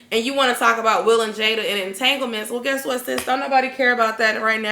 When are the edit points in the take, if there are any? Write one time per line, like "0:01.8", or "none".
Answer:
none